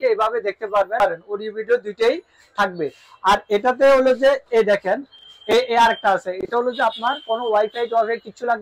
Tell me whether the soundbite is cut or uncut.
cut